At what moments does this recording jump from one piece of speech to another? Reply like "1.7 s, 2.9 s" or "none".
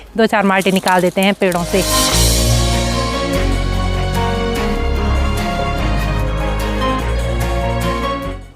none